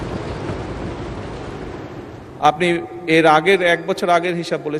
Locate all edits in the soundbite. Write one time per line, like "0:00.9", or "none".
none

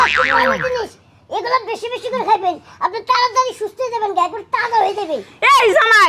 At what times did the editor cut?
none

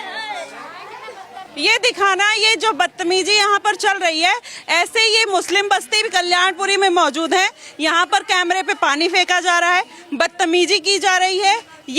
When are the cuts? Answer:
0:01.5

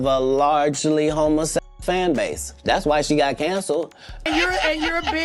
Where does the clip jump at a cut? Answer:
0:01.7
0:04.2

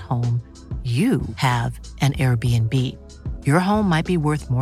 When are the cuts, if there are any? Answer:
none

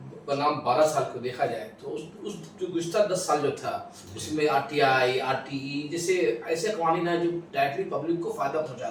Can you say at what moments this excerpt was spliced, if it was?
none

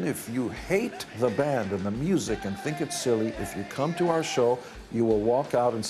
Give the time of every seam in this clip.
0:01.0

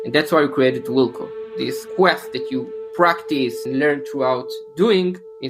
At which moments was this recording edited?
0:01.8
0:03.6

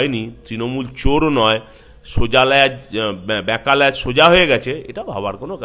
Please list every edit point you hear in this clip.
none

